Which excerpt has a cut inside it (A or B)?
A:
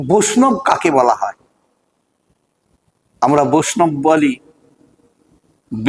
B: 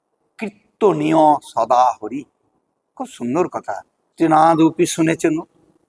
B